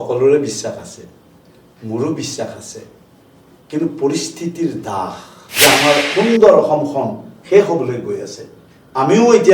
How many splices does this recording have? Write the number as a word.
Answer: one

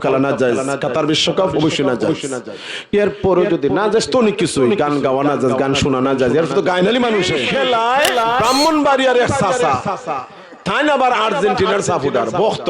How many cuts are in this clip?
one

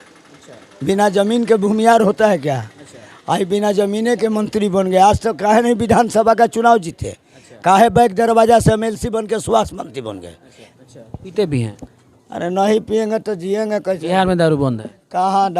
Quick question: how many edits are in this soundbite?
one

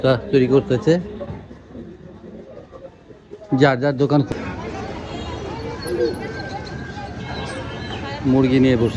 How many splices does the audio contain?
one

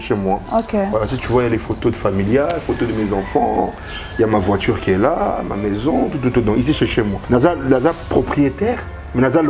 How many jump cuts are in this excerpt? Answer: zero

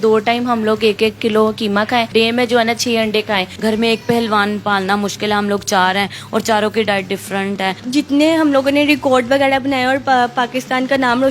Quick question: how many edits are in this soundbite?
three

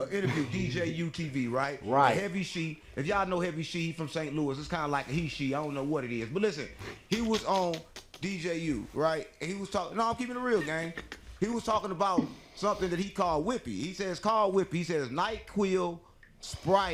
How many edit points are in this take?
zero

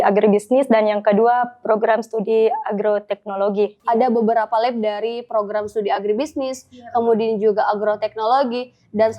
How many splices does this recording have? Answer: one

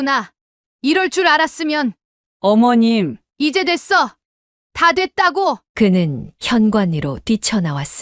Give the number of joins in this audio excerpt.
zero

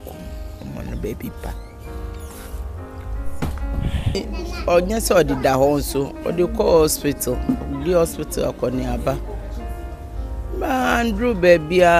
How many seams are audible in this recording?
one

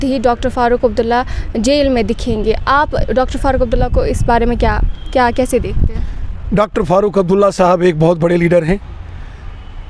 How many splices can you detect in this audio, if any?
zero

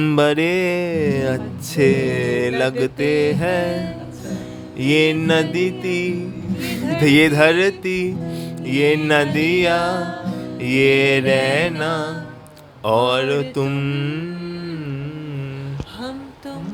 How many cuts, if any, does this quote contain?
zero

